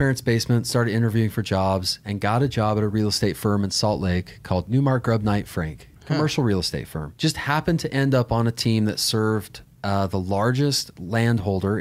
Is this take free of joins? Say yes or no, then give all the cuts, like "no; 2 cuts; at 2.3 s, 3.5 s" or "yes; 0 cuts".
no; 2 cuts; at 4.7 s, 7.0 s